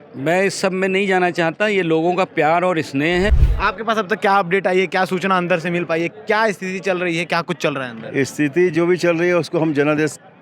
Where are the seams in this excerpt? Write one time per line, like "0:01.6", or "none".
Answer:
0:03.4